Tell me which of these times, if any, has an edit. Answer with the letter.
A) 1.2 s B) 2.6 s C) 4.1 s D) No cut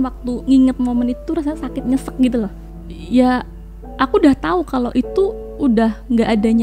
B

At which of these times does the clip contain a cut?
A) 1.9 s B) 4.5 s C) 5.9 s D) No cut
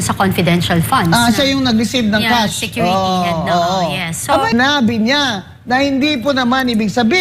B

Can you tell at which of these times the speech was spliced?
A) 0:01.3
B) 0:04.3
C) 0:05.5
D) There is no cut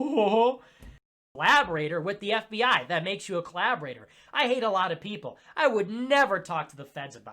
A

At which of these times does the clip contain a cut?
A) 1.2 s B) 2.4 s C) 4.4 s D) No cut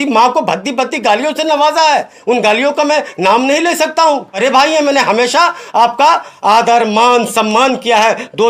C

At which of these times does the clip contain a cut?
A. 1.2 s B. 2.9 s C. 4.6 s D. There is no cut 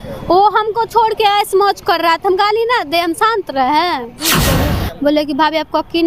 C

